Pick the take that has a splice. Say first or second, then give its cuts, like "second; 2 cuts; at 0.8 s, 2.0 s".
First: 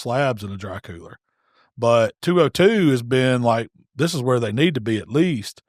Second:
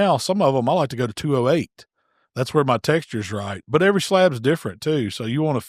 first; 1 cut; at 2.2 s